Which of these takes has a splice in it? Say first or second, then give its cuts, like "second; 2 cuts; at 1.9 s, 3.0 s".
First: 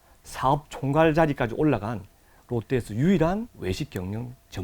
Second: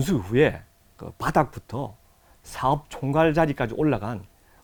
first; 1 cut; at 3.5 s